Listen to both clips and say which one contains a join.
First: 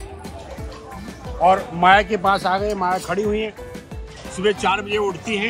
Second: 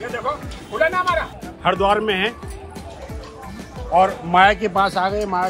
second; 1 cut; at 1.4 s

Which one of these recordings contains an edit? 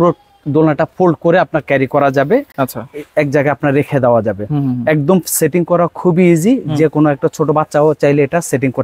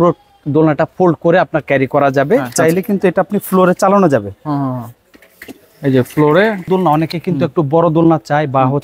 second; 2 cuts; at 2.5 s, 6.6 s

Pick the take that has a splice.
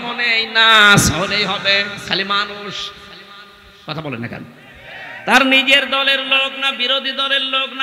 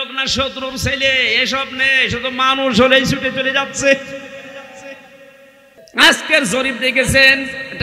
second; 1 cut; at 5.9 s

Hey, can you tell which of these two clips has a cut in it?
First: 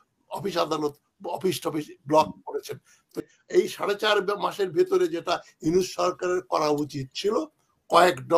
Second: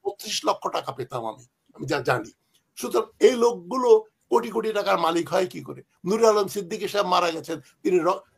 first; 1 cut; at 3.2 s

